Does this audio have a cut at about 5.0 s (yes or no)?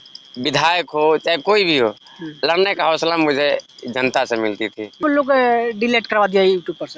yes